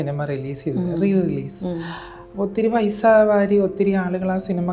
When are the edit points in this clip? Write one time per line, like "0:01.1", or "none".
none